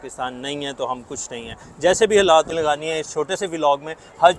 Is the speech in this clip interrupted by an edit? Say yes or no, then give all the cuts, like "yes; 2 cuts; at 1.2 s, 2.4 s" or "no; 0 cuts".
yes; 1 cut; at 2.5 s